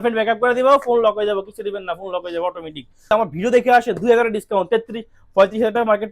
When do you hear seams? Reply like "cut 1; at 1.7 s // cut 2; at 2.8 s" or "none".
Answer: cut 1; at 3.1 s